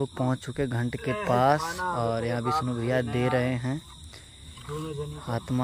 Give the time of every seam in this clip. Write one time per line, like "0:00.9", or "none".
none